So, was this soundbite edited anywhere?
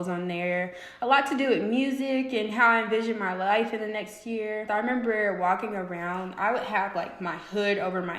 yes; 1 cut; at 4.6 s

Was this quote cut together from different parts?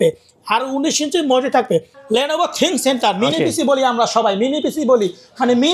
yes; 1 cut; at 1.9 s

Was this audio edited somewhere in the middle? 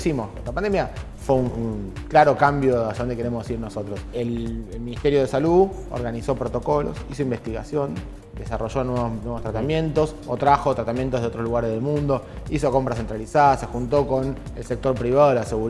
yes; 3 cuts; at 1.1 s, 1.9 s, 4.1 s

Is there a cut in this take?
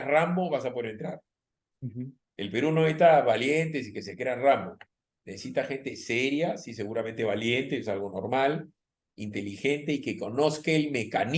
no; 0 cuts

